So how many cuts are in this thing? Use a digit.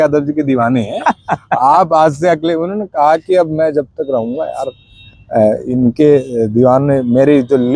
0